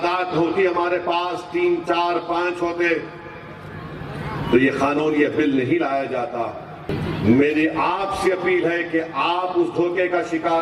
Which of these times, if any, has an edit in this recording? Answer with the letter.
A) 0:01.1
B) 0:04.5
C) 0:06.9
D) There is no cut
C